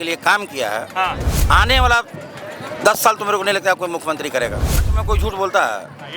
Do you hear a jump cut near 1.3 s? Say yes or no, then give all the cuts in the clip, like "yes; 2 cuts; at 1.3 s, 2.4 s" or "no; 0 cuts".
yes; 2 cuts; at 1.3 s, 4.7 s